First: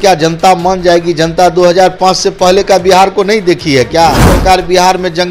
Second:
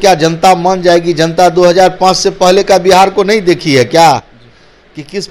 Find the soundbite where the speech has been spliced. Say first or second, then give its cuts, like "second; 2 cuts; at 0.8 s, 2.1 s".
first; 1 cut; at 4.3 s